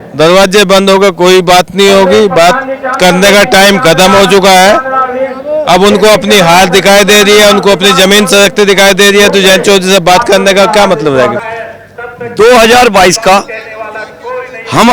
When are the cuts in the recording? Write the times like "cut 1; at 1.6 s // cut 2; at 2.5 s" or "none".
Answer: cut 1; at 11.4 s

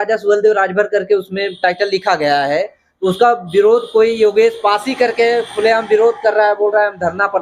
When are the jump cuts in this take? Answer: none

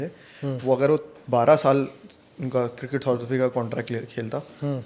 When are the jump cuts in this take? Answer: none

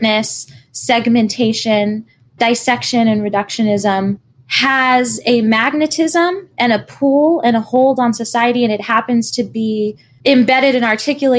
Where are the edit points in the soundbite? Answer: cut 1; at 10.1 s

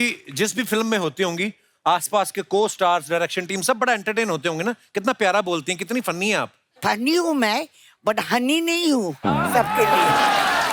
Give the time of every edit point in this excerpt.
none

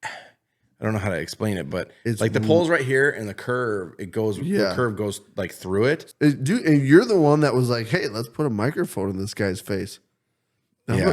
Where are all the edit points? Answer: cut 1; at 6.1 s

